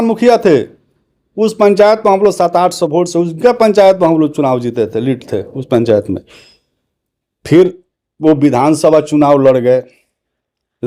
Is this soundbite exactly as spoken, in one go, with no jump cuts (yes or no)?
yes